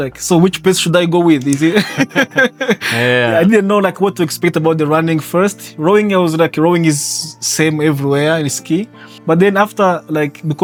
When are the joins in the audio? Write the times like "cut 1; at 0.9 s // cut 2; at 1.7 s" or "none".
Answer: none